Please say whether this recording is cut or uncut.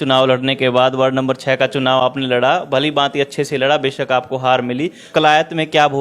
cut